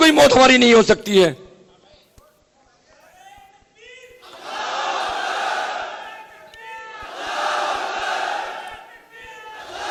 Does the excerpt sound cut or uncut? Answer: uncut